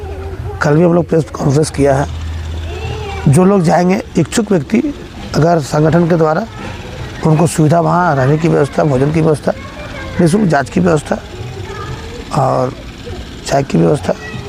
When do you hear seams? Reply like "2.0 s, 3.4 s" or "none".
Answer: none